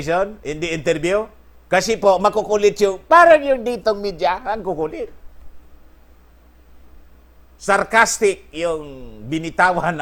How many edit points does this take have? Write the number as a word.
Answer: zero